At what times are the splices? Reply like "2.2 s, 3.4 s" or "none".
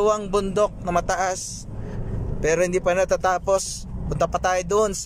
none